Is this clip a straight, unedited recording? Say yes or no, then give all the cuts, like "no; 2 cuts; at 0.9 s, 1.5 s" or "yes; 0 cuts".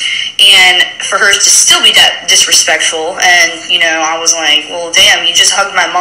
no; 1 cut; at 1.0 s